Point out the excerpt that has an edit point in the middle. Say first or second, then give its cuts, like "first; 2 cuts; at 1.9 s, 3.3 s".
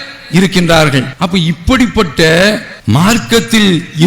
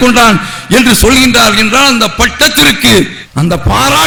first; 1 cut; at 1.2 s